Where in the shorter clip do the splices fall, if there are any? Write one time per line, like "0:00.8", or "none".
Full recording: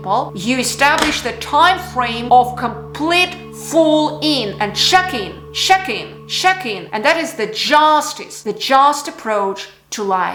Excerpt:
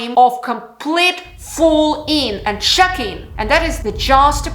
0:03.5